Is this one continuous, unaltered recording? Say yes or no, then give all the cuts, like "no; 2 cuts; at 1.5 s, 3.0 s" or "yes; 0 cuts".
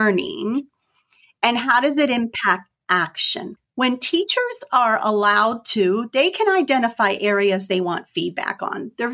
no; 1 cut; at 3.6 s